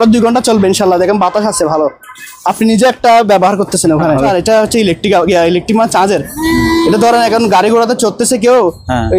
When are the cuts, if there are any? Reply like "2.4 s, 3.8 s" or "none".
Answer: 4.3 s

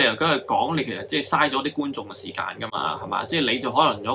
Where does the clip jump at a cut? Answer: none

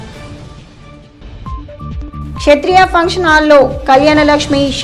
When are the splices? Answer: 1.0 s

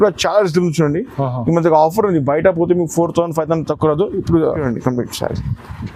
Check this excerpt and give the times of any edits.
4.6 s

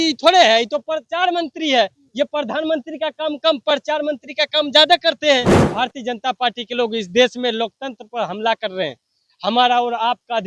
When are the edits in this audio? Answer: 5.6 s

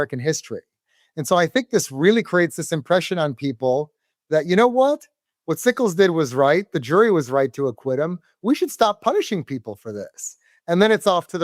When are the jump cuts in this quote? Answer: none

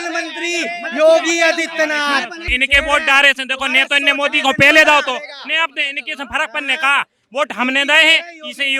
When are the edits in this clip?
2.6 s

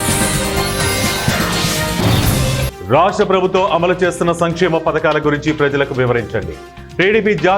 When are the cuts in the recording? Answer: 2.6 s

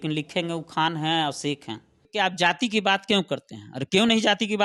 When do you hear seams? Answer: 2.0 s

